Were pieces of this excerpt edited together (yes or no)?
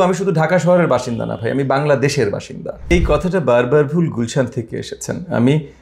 yes